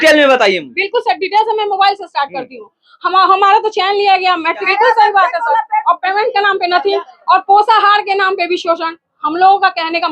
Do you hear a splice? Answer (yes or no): yes